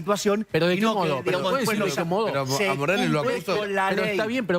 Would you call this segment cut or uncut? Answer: uncut